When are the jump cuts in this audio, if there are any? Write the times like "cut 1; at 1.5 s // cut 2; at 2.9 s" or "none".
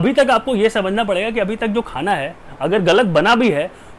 none

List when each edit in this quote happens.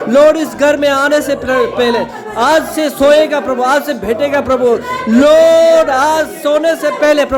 none

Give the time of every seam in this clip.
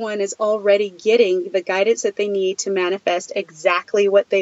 none

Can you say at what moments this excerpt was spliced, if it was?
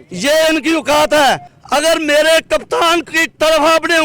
cut 1; at 1.5 s

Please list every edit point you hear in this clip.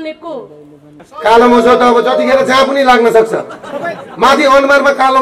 cut 1; at 1.0 s

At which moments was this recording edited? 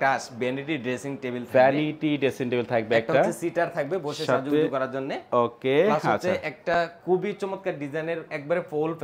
none

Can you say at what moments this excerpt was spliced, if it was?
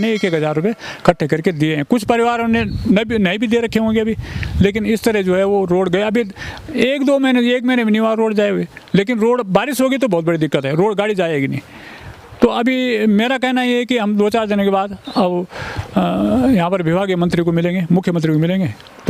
none

